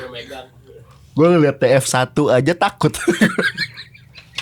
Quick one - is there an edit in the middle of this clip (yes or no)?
no